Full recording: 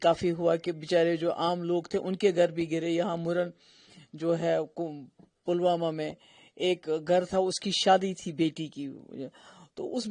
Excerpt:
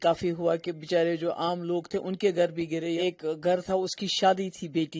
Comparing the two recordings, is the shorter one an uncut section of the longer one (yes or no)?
no